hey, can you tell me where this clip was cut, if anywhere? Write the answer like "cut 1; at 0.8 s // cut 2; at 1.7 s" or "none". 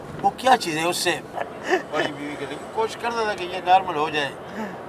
cut 1; at 1.5 s